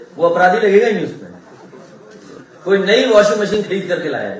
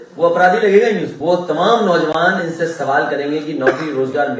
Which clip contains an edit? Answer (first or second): second